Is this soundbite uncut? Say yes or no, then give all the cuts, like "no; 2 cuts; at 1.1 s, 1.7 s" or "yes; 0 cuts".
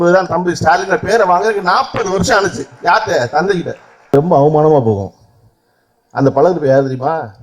no; 1 cut; at 4.1 s